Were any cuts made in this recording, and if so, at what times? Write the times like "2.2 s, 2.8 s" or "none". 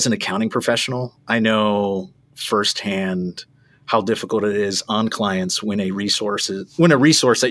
none